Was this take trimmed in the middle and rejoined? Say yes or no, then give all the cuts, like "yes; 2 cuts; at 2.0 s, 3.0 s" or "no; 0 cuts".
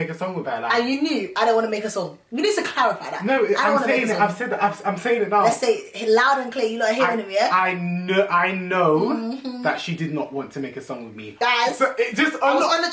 yes; 1 cut; at 11.2 s